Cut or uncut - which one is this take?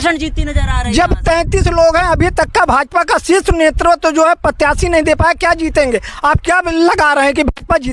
uncut